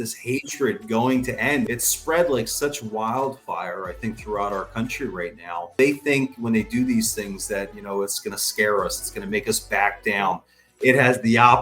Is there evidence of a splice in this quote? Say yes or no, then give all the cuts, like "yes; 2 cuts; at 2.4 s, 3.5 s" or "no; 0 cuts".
yes; 2 cuts; at 1.7 s, 5.7 s